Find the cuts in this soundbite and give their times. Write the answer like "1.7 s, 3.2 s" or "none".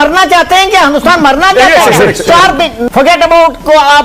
2.8 s